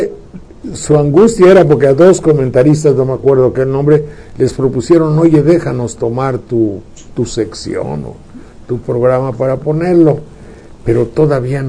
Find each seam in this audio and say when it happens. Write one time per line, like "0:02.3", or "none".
0:03.5